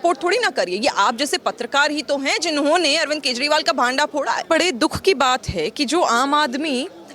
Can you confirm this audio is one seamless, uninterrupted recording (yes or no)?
no